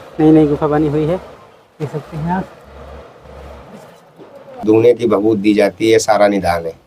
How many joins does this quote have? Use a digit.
1